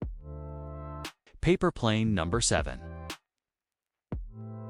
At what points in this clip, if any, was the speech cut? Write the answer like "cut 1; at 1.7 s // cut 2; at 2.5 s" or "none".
cut 1; at 1.4 s // cut 2; at 2.8 s

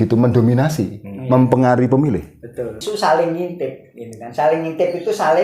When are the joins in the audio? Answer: cut 1; at 2.8 s

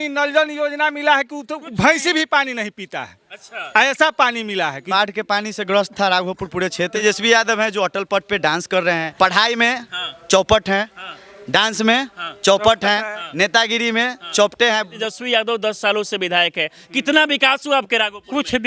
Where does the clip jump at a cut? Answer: cut 1; at 4.8 s // cut 2; at 7.0 s // cut 3; at 9.1 s // cut 4; at 14.9 s

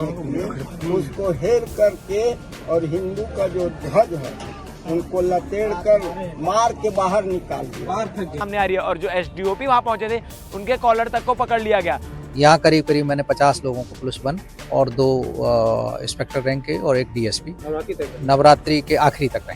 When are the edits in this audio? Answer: cut 1; at 8.5 s // cut 2; at 12.1 s

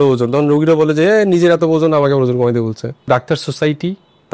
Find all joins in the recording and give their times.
cut 1; at 3.1 s

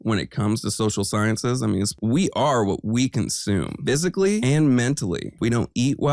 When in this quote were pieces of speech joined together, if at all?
cut 1; at 2.0 s // cut 2; at 5.3 s

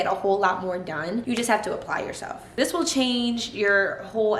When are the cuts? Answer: cut 1; at 2.5 s

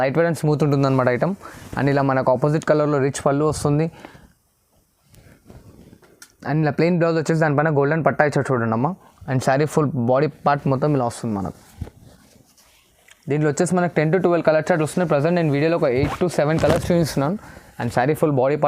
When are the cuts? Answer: none

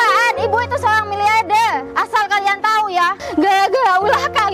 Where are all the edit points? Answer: cut 1; at 1.9 s // cut 2; at 3.2 s

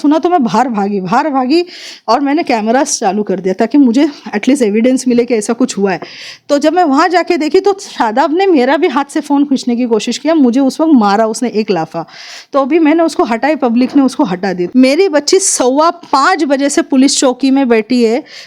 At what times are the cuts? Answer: cut 1; at 14.6 s

